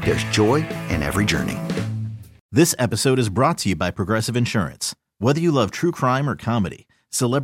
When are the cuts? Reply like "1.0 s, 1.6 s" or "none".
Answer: 2.4 s